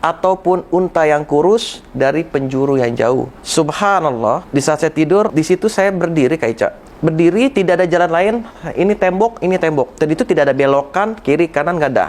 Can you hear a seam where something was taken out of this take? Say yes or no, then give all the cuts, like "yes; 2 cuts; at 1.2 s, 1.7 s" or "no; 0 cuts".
yes; 5 cuts; at 3.4 s, 4.4 s, 5.3 s, 6.9 s, 9.9 s